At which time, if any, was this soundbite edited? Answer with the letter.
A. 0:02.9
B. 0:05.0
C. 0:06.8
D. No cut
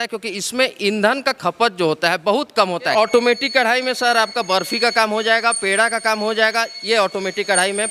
A